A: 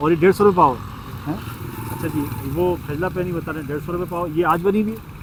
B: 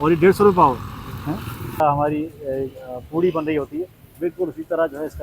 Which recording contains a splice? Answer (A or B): B